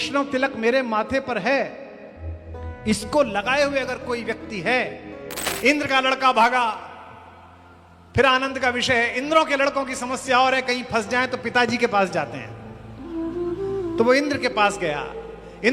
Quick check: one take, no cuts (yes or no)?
no